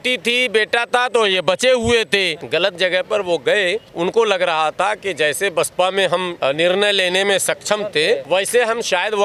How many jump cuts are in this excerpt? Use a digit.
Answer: 4